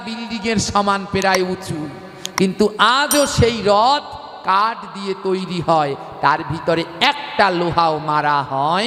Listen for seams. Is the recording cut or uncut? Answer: uncut